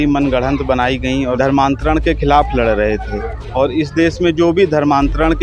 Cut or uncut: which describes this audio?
cut